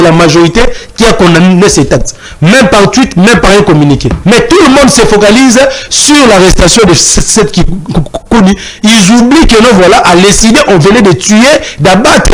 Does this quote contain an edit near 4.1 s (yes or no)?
yes